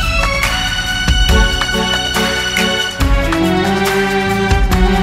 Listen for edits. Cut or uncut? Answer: uncut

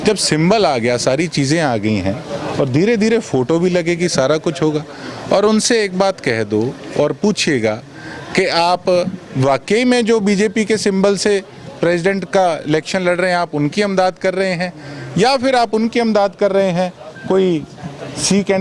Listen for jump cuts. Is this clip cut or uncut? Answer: uncut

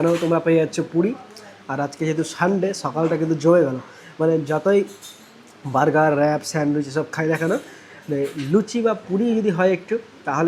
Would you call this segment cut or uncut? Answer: uncut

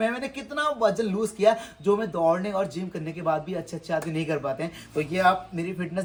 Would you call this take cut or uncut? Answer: uncut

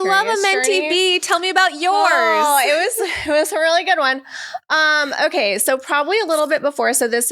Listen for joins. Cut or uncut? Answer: uncut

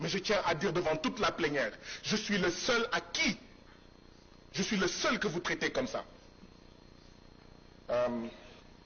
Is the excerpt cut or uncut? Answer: uncut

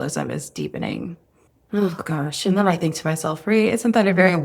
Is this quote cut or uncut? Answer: uncut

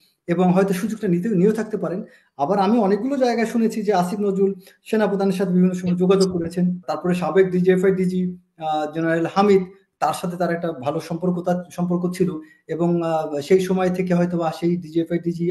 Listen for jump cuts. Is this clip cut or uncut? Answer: cut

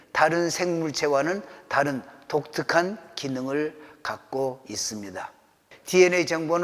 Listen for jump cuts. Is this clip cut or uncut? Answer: cut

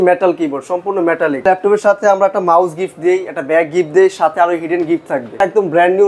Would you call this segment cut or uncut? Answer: cut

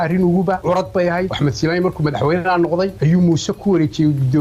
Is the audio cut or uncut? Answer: cut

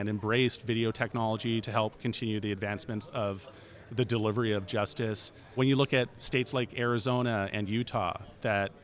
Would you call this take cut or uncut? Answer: cut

